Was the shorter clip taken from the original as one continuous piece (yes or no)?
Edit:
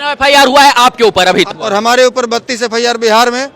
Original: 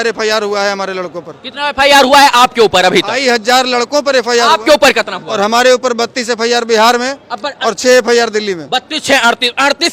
no